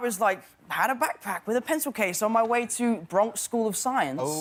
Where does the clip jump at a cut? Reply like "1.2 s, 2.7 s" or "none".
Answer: none